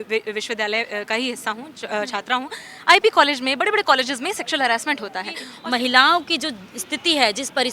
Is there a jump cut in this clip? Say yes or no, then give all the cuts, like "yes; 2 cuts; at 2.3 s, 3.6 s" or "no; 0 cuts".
yes; 1 cut; at 5.5 s